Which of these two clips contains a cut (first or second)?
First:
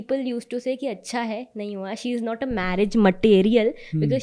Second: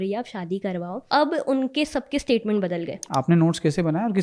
second